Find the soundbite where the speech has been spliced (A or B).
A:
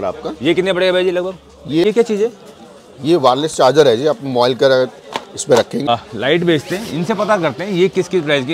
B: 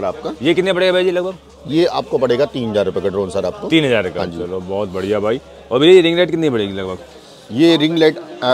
A